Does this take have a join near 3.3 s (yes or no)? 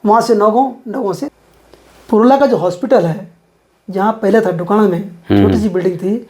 no